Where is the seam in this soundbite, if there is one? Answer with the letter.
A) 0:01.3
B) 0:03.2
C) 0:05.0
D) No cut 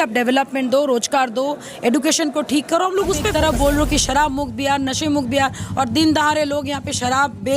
B